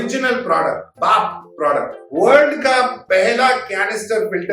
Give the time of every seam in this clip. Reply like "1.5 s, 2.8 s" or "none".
0.9 s, 2.0 s